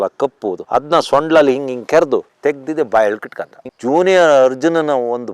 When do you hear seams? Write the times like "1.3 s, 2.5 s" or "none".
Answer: 3.6 s